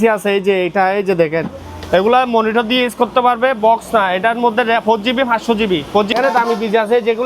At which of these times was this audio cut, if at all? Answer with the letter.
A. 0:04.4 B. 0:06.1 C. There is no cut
B